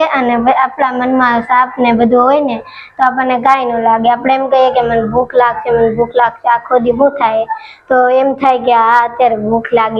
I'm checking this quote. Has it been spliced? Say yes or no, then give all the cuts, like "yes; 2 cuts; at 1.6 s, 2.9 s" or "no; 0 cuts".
no; 0 cuts